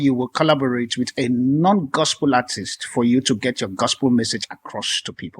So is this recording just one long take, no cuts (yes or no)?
yes